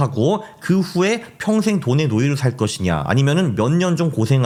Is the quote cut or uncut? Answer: uncut